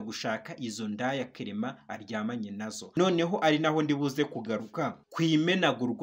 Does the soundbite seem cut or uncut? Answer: cut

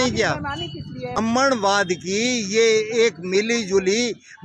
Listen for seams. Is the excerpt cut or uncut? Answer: cut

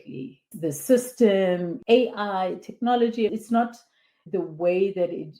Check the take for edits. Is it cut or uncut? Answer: cut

